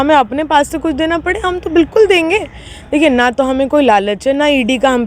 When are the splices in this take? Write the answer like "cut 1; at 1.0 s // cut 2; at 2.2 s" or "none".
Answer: none